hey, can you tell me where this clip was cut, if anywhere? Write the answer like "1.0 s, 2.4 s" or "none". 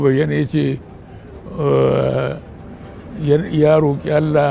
none